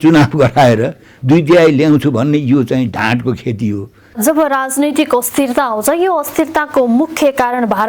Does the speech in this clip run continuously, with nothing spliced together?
no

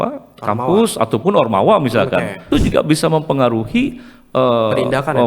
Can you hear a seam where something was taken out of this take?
yes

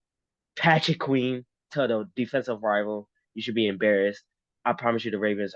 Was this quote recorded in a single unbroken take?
yes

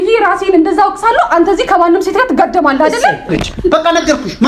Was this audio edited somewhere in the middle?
yes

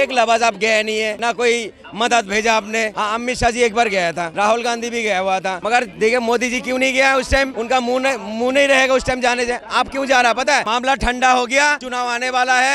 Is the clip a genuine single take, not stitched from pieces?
no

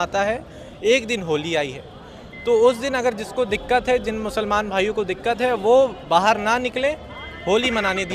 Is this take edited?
no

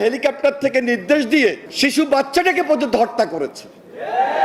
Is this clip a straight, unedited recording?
no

